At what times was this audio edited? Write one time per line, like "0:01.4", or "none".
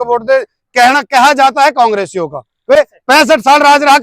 0:02.8

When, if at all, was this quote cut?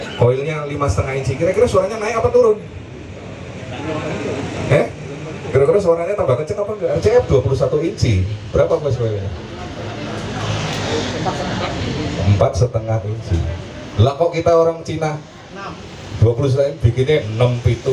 0:07.0

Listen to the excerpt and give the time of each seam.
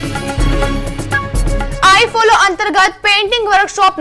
none

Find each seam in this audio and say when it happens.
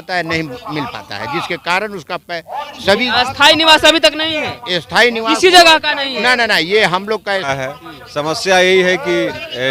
0:07.5

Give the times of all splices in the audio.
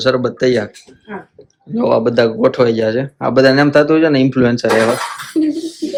none

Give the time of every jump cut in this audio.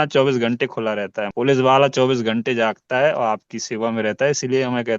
0:01.2

